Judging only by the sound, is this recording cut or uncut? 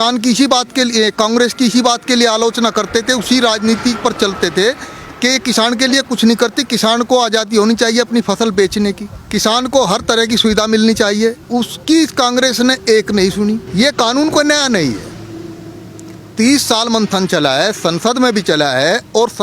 cut